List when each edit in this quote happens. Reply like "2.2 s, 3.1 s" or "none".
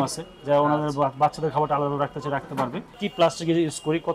3.0 s